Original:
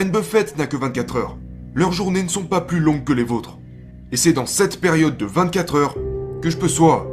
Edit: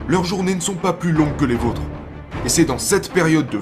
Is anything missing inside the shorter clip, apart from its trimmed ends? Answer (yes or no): no